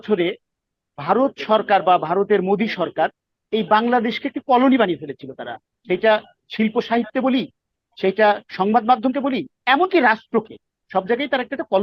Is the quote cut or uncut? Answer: uncut